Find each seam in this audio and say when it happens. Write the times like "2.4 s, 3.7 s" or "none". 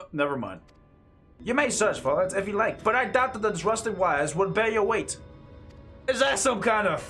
1.3 s